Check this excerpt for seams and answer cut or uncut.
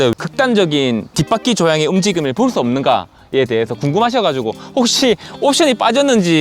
uncut